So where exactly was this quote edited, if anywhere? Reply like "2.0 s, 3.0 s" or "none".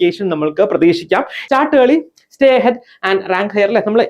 1.4 s